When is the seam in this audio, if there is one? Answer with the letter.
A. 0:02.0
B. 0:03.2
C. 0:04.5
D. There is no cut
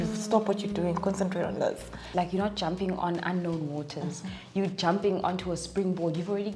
A